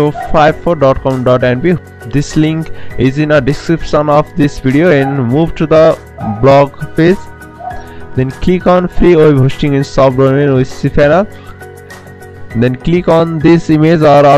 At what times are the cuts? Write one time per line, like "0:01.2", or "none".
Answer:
none